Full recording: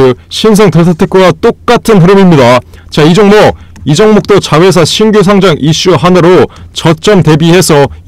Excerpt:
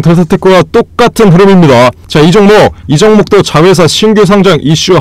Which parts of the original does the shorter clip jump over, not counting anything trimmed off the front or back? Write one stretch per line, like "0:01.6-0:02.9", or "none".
0:02.7-0:02.8
0:03.7-0:03.8